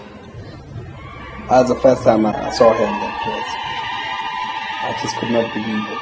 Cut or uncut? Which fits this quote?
cut